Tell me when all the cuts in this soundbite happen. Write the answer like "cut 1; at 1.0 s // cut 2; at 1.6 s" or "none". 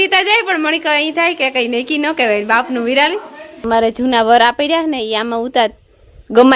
cut 1; at 3.5 s